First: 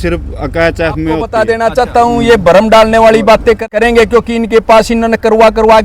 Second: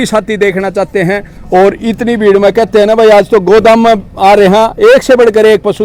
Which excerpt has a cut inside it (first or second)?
first